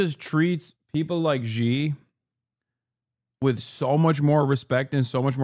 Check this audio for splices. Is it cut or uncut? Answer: uncut